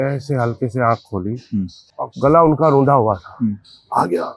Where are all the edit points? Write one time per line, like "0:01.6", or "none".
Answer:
0:01.8